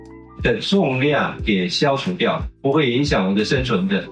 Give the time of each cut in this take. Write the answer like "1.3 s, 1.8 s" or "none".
2.5 s